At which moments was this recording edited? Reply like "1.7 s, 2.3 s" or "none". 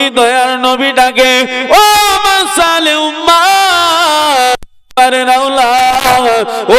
4.8 s